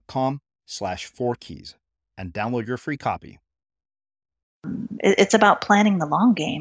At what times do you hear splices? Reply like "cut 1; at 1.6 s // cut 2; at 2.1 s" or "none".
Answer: cut 1; at 4.7 s